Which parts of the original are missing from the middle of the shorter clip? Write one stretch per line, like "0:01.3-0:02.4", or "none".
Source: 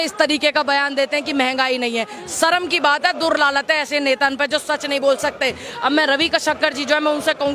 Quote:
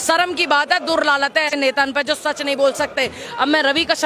0:03.9-0:04.0